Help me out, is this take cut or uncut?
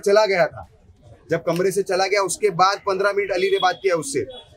uncut